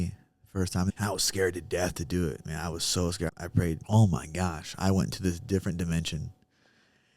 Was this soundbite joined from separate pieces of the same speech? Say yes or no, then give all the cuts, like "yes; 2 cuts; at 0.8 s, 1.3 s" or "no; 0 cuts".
yes; 2 cuts; at 0.9 s, 3.3 s